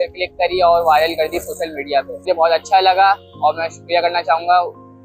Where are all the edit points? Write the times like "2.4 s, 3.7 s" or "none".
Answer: 2.2 s